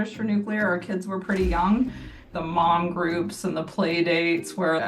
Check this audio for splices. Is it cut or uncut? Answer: cut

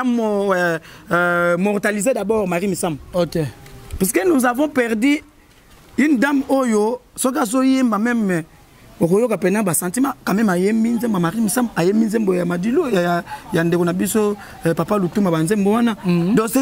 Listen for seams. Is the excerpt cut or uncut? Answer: uncut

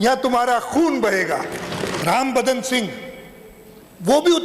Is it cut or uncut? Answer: cut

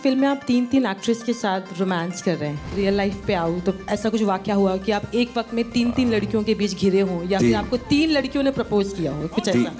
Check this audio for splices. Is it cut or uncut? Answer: cut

